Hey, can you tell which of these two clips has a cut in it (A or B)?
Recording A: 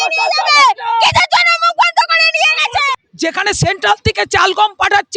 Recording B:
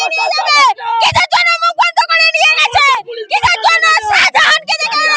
A